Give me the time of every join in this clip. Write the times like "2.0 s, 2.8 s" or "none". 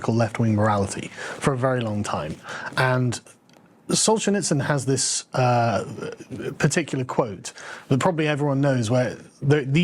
1.6 s